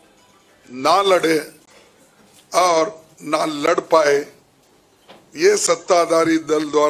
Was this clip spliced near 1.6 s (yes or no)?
no